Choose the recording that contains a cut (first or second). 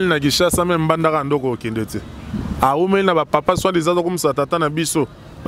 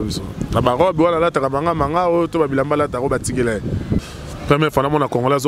second